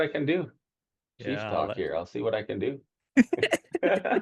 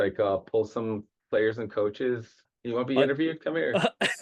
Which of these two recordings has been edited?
second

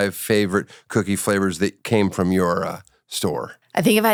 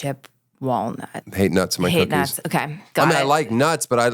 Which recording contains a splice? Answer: second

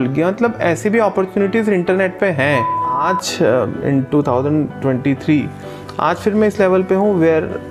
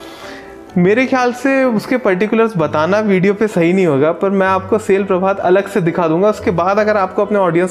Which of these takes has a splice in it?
first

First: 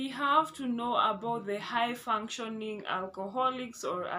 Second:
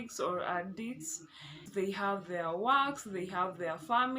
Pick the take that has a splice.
second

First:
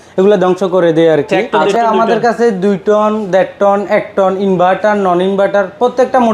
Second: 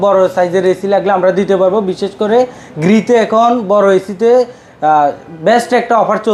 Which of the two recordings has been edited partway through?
first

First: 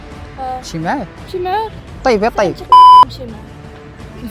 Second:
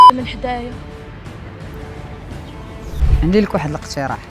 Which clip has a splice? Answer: second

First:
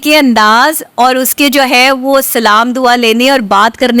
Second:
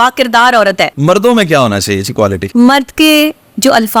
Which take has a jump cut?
second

